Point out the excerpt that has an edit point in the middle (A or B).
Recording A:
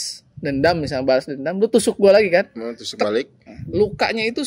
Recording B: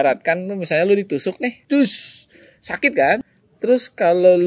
B